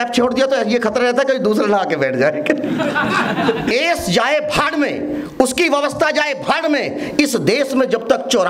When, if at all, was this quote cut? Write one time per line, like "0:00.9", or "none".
0:03.7